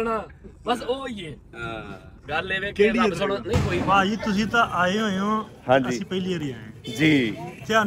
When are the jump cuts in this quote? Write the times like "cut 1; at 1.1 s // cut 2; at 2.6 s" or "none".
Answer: cut 1; at 3.7 s